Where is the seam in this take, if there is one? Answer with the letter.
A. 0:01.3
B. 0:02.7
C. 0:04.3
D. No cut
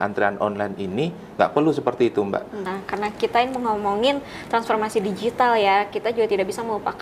B